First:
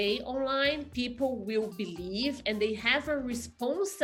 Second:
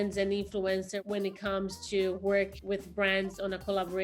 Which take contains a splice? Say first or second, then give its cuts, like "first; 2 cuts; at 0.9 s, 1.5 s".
second; 2 cuts; at 1.0 s, 2.6 s